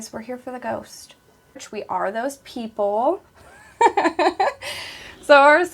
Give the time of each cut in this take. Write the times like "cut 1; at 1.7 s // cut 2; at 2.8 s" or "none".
cut 1; at 1.7 s